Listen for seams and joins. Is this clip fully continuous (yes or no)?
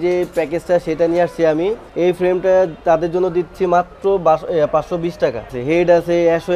no